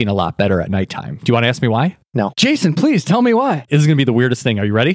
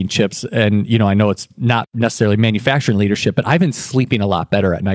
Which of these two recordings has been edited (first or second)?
first